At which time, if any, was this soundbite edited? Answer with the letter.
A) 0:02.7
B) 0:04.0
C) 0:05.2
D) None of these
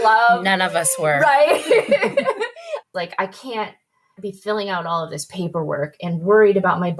A